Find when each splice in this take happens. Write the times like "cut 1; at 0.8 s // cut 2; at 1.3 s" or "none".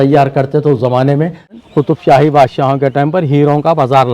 cut 1; at 1.6 s